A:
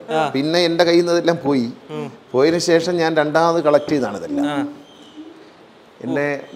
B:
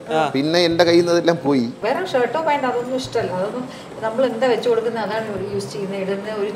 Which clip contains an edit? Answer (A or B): B